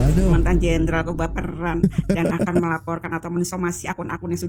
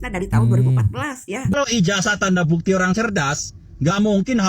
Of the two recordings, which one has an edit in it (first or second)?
second